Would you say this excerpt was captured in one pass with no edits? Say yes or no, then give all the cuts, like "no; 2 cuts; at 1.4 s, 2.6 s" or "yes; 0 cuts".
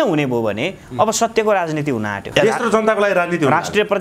no; 1 cut; at 2.2 s